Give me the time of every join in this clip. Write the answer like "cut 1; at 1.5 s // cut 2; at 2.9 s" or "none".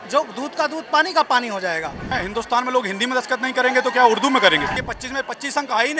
cut 1; at 2.1 s // cut 2; at 4.7 s